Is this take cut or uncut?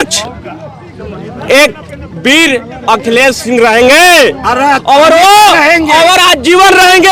uncut